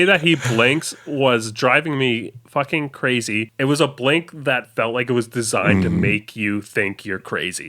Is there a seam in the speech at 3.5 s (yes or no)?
yes